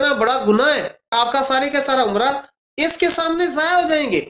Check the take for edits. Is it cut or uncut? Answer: cut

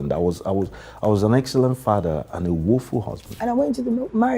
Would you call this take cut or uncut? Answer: cut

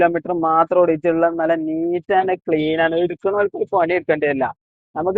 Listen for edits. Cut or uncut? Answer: uncut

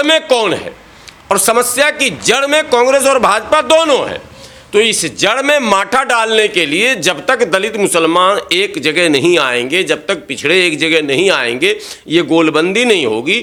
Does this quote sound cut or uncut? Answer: uncut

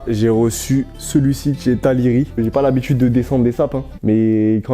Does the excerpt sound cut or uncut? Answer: cut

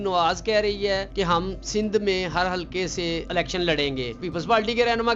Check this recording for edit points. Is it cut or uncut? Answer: cut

